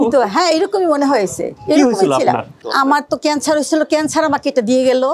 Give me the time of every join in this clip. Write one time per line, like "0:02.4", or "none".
0:02.7